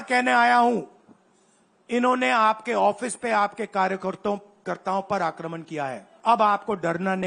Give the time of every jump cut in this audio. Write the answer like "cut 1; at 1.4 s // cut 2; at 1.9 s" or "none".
cut 1; at 6.1 s